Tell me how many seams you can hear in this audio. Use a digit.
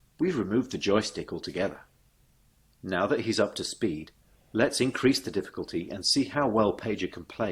0